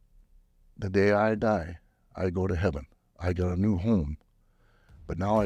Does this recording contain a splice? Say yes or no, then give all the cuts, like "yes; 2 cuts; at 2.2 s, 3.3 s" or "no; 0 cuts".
no; 0 cuts